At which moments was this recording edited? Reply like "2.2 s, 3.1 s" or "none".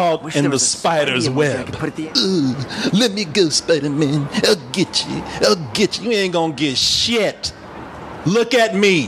1.9 s